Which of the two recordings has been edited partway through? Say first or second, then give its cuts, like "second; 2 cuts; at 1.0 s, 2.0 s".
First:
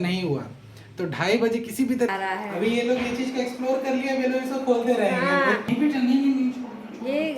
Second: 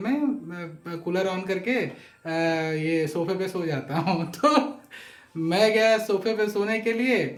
first; 2 cuts; at 2.1 s, 5.6 s